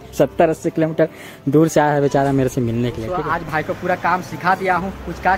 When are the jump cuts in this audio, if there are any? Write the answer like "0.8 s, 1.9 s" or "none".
3.0 s